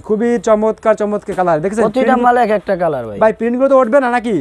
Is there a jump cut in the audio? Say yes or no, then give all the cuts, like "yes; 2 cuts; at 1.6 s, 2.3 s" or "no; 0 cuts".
no; 0 cuts